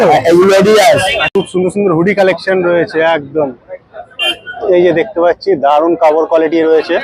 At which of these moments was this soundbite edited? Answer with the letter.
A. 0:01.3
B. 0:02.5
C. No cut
A